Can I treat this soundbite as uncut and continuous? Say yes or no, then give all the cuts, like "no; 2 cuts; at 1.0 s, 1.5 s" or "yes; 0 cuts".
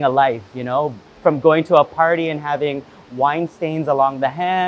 yes; 0 cuts